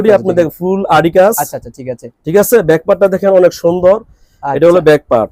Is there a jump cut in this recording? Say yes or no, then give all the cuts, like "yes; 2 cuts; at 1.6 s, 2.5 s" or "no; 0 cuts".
no; 0 cuts